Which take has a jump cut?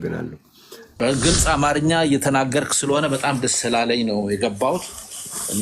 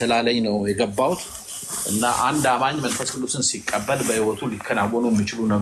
first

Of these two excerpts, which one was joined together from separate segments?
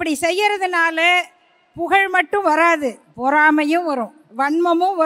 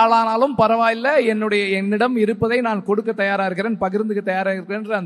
first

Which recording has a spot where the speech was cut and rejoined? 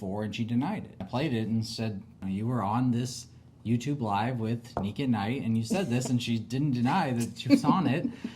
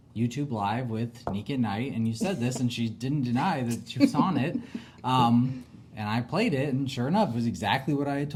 first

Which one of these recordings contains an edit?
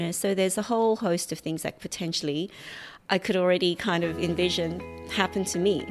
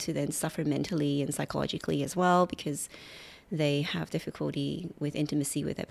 first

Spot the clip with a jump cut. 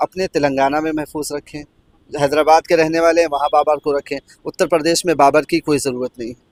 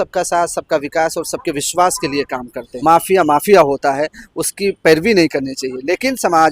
second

